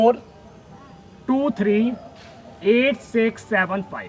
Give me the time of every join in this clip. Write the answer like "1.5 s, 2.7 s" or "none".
none